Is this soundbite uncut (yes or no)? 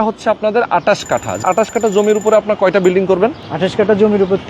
no